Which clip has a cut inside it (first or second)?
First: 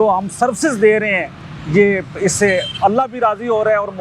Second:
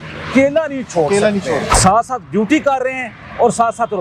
second